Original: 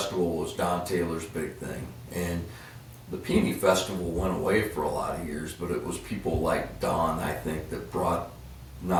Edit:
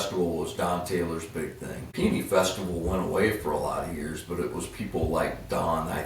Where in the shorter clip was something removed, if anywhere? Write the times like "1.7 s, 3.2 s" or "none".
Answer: 1.9 s